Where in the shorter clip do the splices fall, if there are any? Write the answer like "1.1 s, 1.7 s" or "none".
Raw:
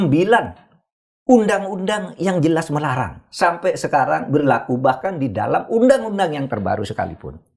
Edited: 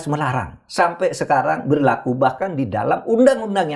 none